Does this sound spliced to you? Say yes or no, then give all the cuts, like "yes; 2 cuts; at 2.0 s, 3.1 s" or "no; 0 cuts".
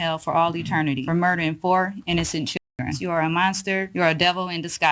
yes; 3 cuts; at 1.0 s, 3.0 s, 3.9 s